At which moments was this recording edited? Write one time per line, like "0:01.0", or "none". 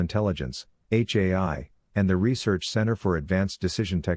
0:02.3